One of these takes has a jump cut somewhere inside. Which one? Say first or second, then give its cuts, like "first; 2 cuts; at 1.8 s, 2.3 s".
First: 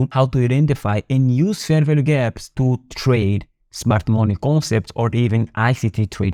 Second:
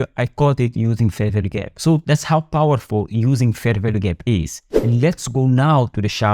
second; 2 cuts; at 2.0 s, 4.7 s